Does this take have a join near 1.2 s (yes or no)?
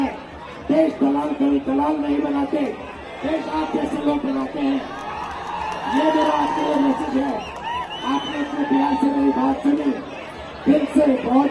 no